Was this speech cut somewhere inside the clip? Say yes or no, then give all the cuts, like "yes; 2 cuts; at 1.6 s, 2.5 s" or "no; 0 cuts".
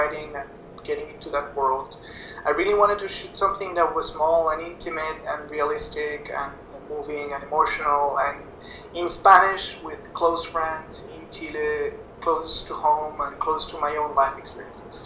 no; 0 cuts